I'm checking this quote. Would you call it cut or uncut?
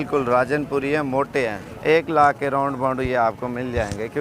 cut